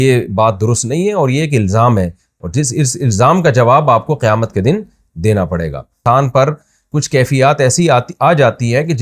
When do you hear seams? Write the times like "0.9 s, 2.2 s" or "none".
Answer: 6.0 s